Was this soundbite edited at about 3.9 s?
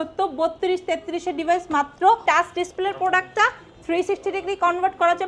no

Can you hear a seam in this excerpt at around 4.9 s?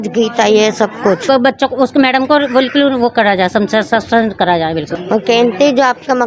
yes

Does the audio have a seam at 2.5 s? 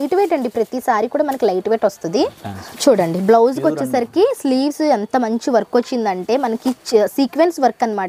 yes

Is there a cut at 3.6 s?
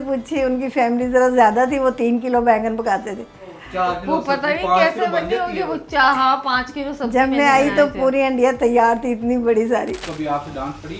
yes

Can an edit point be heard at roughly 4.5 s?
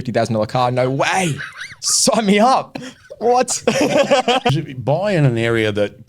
yes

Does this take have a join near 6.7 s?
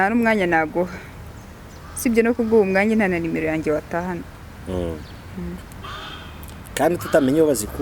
no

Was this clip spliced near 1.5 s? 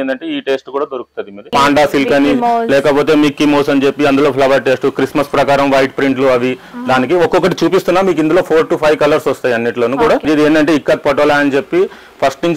yes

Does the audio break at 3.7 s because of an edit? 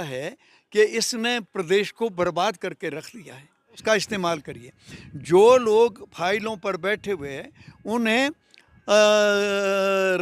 yes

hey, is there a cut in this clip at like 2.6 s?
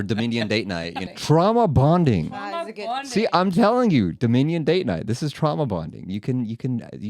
no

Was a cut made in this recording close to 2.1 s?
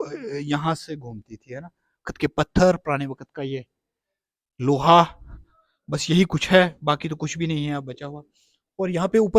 yes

